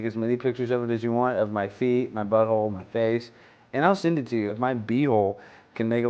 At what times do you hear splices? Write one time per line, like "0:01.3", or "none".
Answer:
0:04.5

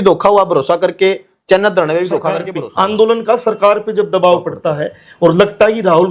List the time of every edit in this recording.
0:02.6

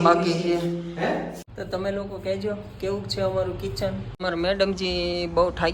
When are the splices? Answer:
0:01.5
0:04.1

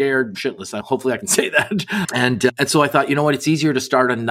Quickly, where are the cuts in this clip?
none

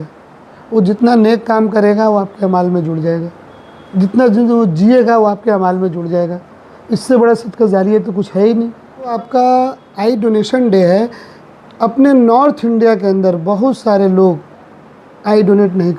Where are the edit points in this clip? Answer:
0:09.2

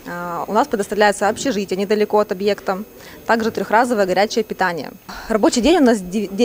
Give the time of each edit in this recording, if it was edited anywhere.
0:05.1

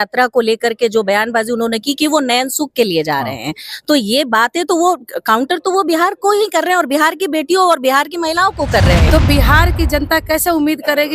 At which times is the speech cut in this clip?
0:09.1

